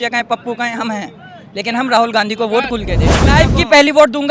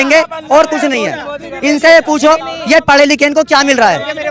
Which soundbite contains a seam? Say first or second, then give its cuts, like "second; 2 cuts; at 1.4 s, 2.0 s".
first; 1 cut; at 3.3 s